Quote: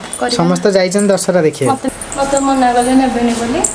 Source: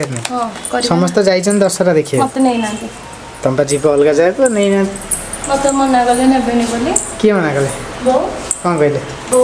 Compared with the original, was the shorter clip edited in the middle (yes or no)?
yes